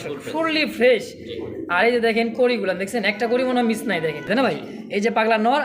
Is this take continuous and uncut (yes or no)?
no